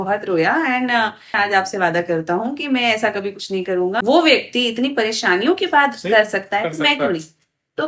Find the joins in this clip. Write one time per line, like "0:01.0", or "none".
0:01.3
0:04.0